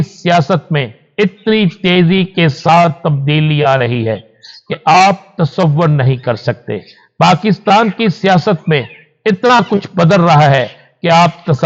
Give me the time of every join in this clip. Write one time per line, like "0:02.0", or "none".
none